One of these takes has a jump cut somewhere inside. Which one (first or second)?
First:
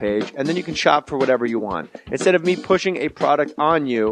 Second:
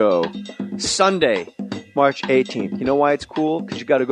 first